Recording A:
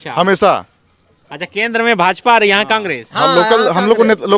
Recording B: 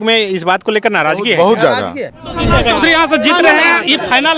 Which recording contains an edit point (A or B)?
B